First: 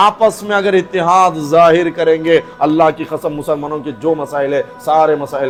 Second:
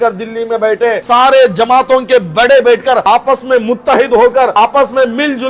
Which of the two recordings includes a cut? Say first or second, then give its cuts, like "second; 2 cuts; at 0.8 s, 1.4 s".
second; 3 cuts; at 1.0 s, 3.0 s, 4.5 s